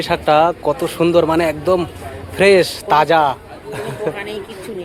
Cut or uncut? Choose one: uncut